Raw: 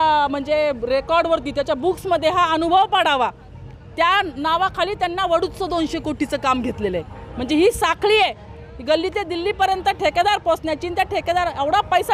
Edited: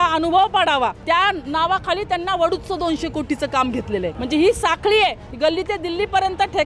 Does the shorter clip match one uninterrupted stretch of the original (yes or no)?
no